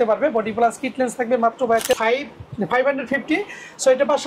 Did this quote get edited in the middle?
yes; 1 cut; at 1.9 s

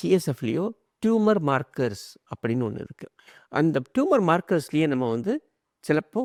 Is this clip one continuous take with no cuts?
yes; 0 cuts

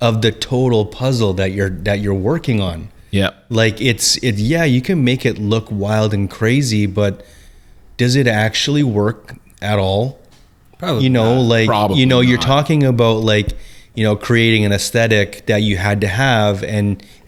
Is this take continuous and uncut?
yes; 0 cuts

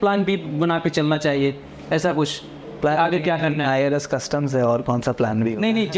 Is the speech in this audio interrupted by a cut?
no; 0 cuts

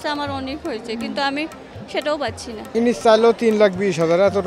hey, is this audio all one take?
no; 1 cut; at 2.7 s

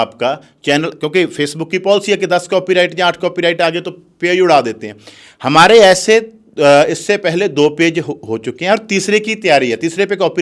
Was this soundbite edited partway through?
no; 0 cuts

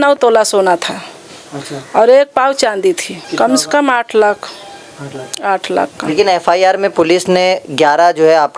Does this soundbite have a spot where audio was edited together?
yes; 1 cut; at 3.3 s

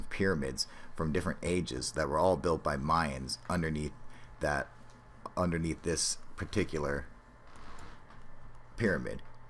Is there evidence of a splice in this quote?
yes; 1 cut; at 5.8 s

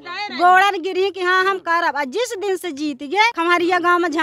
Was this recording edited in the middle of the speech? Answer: yes; 1 cut; at 3.3 s

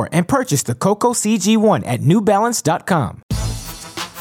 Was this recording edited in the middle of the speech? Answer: yes; 1 cut; at 3.2 s

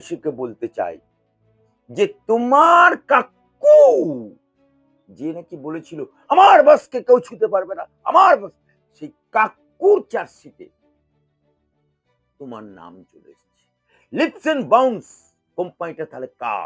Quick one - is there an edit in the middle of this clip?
no; 0 cuts

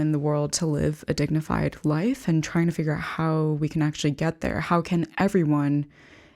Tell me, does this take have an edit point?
no; 0 cuts

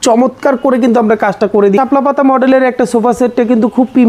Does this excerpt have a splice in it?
yes; 1 cut; at 1.8 s

